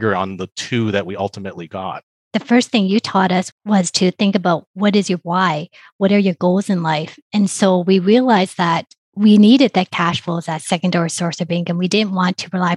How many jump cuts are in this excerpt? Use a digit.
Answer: 2